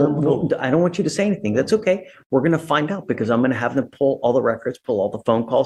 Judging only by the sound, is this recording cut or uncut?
uncut